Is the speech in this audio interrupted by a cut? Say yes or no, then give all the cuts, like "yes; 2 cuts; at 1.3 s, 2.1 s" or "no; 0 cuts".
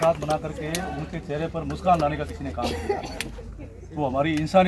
no; 0 cuts